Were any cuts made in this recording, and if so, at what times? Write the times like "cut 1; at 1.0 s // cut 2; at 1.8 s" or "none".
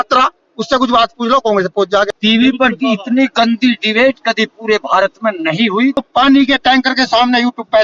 cut 1; at 2.1 s // cut 2; at 6.0 s